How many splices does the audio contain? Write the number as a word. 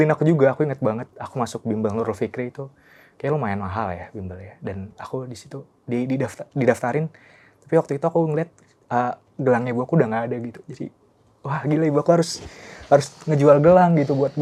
zero